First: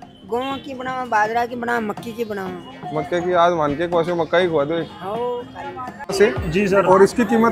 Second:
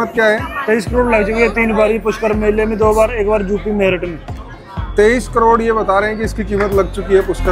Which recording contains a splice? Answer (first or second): first